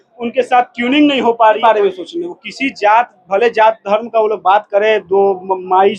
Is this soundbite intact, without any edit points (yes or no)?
no